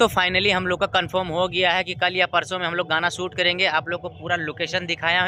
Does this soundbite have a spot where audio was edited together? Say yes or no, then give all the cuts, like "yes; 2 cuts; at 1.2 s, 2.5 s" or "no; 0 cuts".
no; 0 cuts